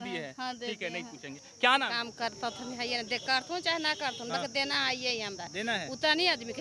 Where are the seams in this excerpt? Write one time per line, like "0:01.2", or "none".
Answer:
0:01.9